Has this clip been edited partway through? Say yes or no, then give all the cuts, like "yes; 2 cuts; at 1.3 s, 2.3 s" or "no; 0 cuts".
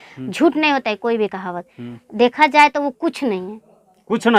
no; 0 cuts